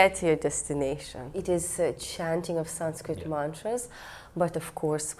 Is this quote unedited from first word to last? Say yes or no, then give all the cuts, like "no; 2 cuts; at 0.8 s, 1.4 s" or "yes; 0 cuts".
no; 1 cut; at 1.4 s